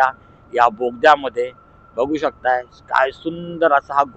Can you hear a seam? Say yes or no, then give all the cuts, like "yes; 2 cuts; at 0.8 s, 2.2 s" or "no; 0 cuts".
no; 0 cuts